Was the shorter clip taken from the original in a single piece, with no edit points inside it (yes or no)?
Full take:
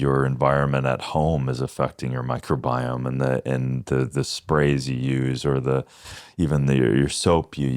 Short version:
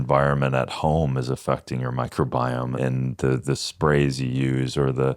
no